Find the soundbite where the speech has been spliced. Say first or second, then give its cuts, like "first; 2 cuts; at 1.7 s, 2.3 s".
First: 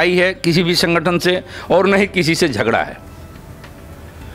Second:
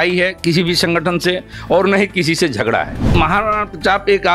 second; 1 cut; at 3.1 s